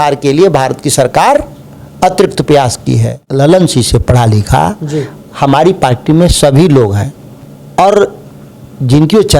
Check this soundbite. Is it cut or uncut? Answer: cut